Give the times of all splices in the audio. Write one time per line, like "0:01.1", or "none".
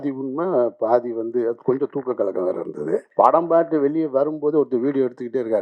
0:03.1